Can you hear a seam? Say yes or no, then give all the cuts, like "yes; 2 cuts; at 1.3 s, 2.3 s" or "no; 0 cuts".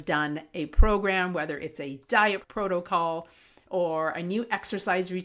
yes; 1 cut; at 2.4 s